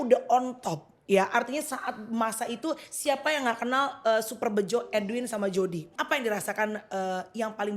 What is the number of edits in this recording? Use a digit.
1